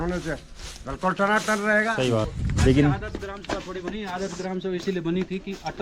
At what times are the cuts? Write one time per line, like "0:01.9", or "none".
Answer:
0:02.4